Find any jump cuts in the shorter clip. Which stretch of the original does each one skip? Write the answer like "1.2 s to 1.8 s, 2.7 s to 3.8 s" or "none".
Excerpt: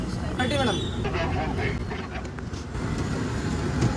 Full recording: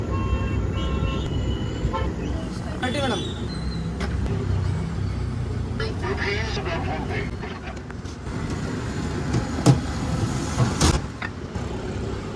3.5 s to 6.5 s